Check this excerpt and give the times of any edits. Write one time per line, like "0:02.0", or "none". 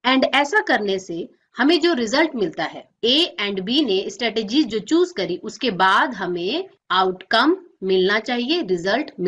none